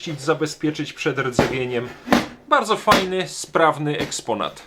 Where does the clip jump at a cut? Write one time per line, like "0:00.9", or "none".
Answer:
none

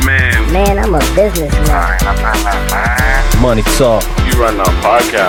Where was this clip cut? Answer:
none

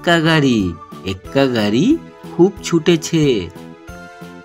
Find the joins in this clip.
0:03.5

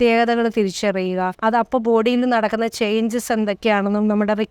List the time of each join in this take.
0:01.3

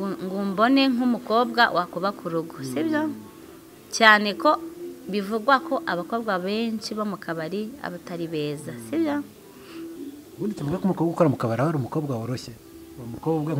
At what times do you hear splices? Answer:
0:09.9

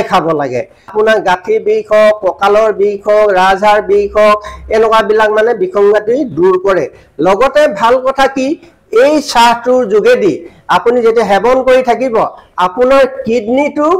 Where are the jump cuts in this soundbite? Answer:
0:00.9

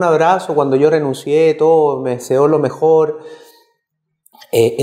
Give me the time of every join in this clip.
none

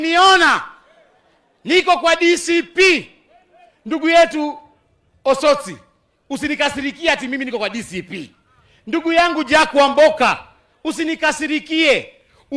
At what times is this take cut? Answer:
none

